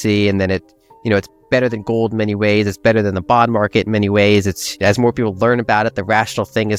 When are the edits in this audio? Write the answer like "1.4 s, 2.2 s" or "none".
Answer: none